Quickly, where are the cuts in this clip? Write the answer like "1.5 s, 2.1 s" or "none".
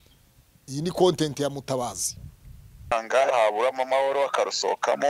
2.9 s

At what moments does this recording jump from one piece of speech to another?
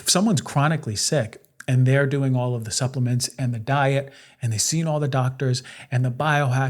none

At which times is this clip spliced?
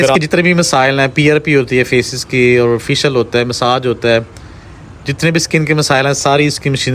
none

